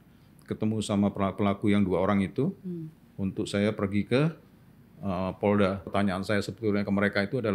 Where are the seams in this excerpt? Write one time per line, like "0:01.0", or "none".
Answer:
0:05.9